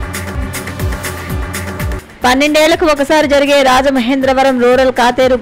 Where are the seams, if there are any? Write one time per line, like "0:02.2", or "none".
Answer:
none

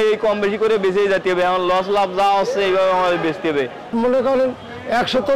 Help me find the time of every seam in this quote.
0:03.9

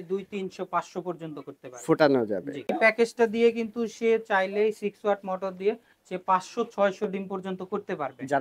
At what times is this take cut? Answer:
0:02.7

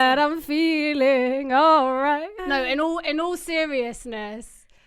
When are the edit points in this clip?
none

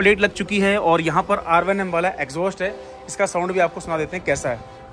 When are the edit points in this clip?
none

